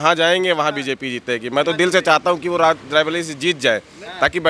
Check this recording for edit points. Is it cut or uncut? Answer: uncut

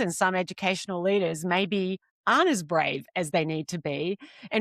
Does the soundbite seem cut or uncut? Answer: uncut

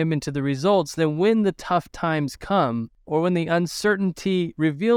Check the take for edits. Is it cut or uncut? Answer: cut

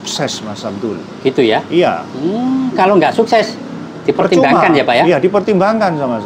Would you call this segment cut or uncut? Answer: uncut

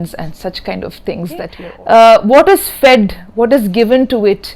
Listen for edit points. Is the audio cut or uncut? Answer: cut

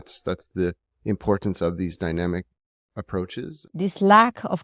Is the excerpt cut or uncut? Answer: cut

